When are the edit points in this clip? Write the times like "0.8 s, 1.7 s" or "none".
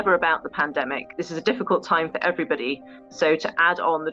none